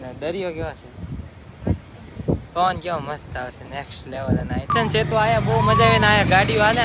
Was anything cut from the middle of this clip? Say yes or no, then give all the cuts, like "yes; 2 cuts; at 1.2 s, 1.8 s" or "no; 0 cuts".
yes; 1 cut; at 4.7 s